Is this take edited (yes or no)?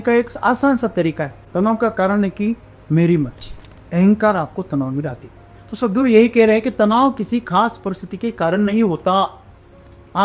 yes